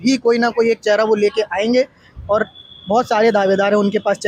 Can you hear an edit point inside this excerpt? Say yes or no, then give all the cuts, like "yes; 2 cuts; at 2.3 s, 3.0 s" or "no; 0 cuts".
no; 0 cuts